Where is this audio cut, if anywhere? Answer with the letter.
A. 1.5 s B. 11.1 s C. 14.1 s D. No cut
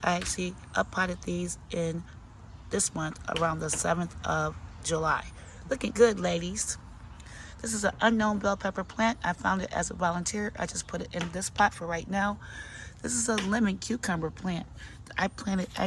D